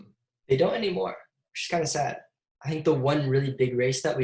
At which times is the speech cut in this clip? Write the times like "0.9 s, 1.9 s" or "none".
2.3 s